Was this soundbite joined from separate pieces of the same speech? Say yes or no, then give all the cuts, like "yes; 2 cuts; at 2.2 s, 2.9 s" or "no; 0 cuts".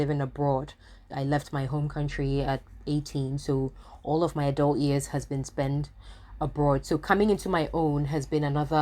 yes; 1 cut; at 1.1 s